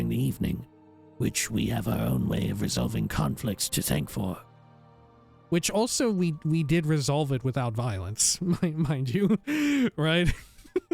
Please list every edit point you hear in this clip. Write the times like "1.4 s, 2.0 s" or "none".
3.6 s